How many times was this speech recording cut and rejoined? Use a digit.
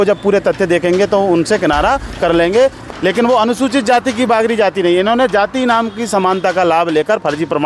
1